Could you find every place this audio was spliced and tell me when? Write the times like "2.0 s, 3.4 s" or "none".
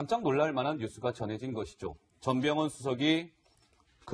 2.5 s